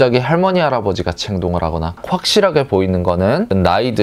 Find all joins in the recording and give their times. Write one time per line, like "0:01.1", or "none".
0:02.0